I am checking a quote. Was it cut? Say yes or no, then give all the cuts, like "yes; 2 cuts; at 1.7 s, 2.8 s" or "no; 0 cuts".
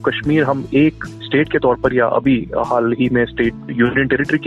yes; 1 cut; at 1.0 s